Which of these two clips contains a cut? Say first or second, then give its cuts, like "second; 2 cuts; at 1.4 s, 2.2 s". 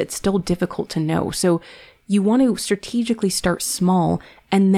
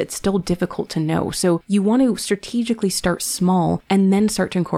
second; 2 cuts; at 1.6 s, 3.8 s